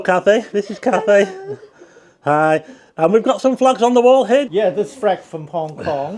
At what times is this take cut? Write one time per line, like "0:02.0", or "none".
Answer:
0:04.5